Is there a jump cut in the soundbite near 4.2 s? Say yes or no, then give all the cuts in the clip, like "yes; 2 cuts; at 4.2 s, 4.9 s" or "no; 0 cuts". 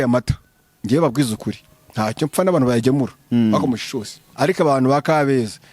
yes; 1 cut; at 4.2 s